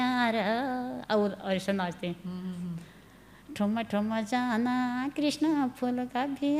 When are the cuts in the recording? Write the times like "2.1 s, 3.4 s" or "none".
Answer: none